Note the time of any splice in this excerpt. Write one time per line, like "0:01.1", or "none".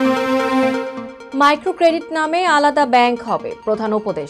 0:01.0